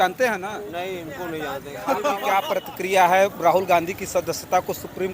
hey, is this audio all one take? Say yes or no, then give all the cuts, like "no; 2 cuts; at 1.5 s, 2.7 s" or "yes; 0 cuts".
no; 1 cut; at 2.5 s